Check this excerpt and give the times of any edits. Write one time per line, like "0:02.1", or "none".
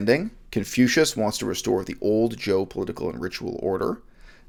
none